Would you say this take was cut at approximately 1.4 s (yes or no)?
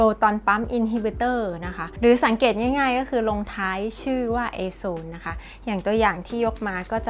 no